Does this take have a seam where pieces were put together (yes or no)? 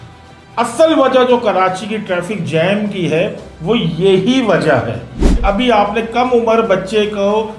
yes